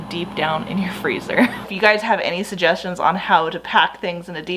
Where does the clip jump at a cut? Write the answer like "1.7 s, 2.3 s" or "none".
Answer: 1.7 s